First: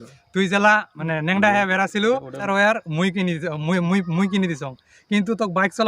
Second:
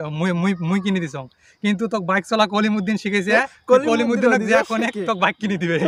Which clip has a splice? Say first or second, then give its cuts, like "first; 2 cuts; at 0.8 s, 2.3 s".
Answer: first; 2 cuts; at 0.9 s, 2.5 s